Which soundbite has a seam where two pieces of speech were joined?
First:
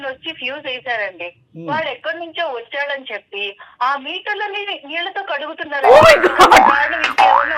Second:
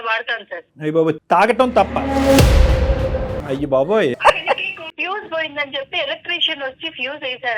second; 2 cuts; at 3.3 s, 4.9 s

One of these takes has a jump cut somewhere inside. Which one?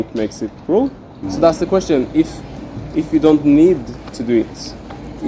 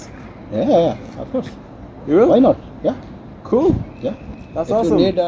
first; 1 cut; at 1.2 s

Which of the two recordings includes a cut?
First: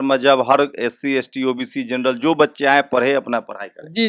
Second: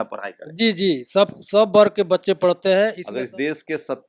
second; 1 cut; at 3.0 s

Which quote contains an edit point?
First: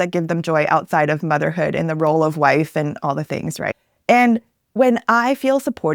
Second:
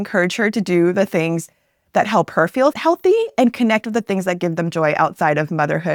first; 1 cut; at 3.7 s

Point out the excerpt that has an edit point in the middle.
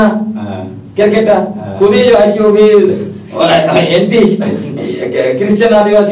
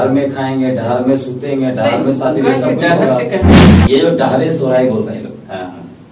second; 1 cut; at 3.7 s

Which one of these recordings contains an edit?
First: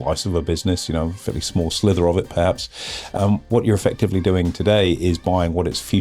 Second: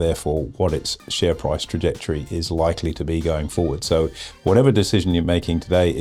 first; 1 cut; at 3.1 s

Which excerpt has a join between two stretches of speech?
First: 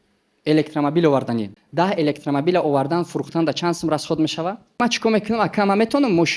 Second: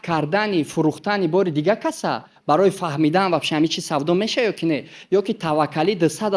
first; 2 cuts; at 1.6 s, 4.8 s

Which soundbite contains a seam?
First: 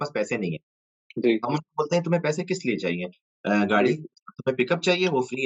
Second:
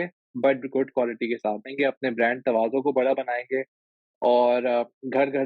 second; 1 cut; at 1.7 s

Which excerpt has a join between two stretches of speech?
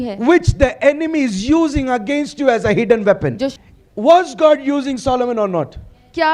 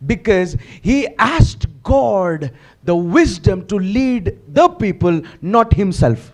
first; 1 cut; at 3.5 s

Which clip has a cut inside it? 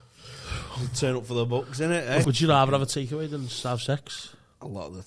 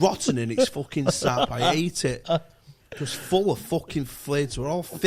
first; 1 cut; at 2.2 s

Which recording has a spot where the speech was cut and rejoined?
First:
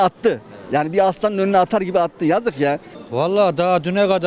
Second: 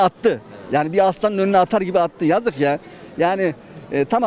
first; 1 cut; at 2.9 s

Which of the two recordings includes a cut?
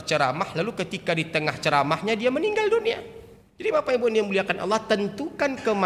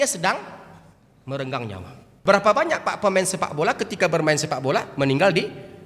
second; 1 cut; at 2.1 s

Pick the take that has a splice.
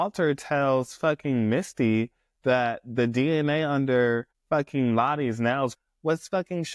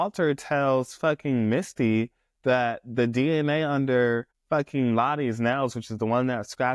first; 1 cut; at 5.8 s

